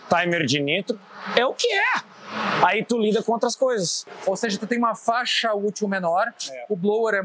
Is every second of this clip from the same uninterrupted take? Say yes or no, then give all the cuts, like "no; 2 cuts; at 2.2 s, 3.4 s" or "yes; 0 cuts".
no; 1 cut; at 4.1 s